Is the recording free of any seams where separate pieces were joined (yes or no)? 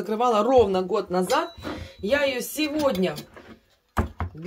yes